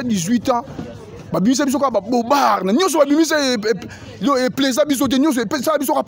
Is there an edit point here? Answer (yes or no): no